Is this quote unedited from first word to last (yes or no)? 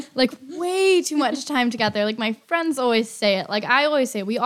yes